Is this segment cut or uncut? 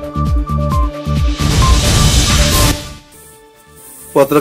uncut